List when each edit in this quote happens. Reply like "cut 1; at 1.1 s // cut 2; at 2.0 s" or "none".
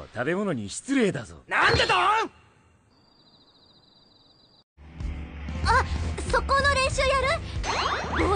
cut 1; at 4.8 s

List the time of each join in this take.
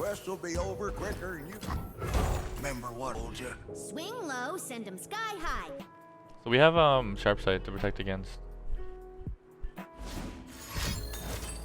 cut 1; at 1.5 s // cut 2; at 3.2 s // cut 3; at 5.8 s

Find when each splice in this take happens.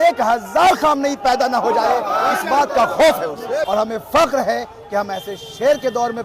cut 1; at 3.7 s

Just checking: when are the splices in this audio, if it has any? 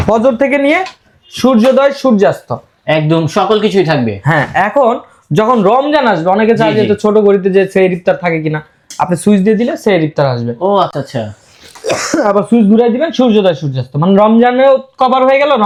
none

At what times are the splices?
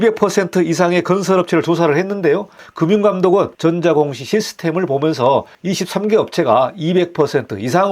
cut 1; at 2.6 s // cut 2; at 3.5 s

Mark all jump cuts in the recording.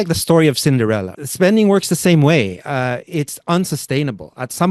cut 1; at 1.1 s

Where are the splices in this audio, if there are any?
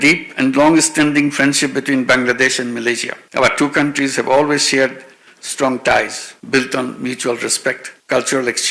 none

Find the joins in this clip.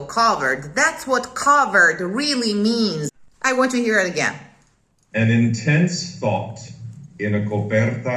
cut 1; at 3.2 s

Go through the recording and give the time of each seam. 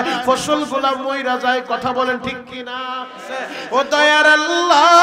cut 1; at 3.5 s

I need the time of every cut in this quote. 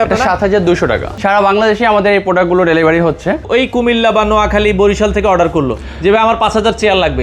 cut 1; at 1.1 s // cut 2; at 3.4 s

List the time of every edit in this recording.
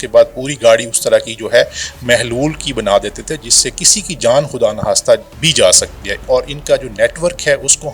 cut 1; at 6.1 s

